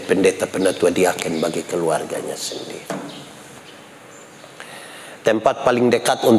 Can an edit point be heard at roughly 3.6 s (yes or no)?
yes